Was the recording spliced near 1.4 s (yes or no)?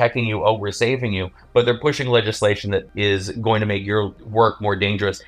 no